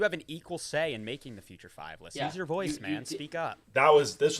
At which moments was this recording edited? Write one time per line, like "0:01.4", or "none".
none